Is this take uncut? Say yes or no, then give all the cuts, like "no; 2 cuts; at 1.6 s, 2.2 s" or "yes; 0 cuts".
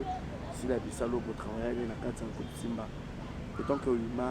yes; 0 cuts